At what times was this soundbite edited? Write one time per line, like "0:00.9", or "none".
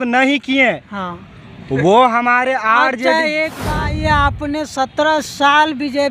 0:03.6